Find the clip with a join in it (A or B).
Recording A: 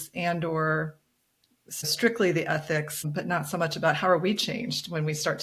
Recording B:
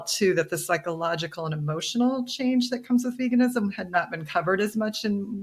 A